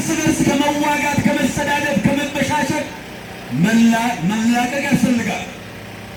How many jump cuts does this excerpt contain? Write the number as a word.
zero